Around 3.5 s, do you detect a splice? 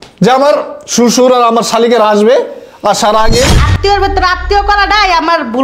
yes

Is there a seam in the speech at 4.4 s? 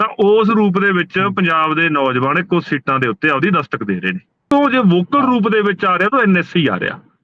yes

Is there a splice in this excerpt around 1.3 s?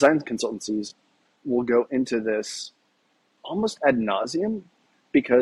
yes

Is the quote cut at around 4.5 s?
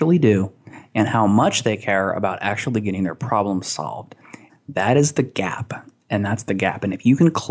yes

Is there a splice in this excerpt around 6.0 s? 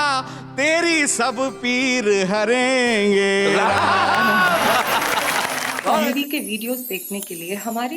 yes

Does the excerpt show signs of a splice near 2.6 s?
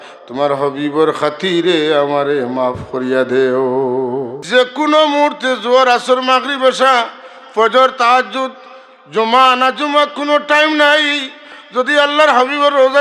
no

